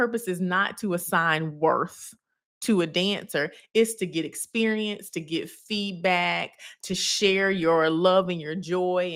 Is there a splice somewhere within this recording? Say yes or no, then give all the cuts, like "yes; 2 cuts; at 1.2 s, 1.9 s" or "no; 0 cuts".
no; 0 cuts